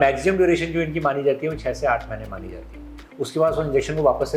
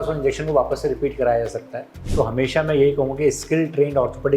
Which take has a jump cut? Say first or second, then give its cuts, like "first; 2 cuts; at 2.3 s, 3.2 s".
second; 1 cut; at 2.0 s